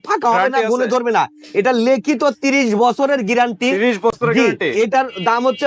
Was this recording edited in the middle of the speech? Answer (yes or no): no